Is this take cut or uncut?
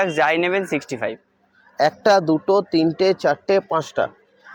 uncut